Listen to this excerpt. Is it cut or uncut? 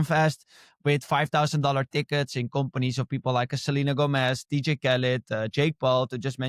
uncut